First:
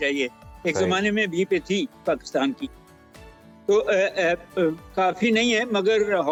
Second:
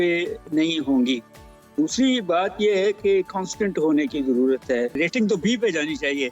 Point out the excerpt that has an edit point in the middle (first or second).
second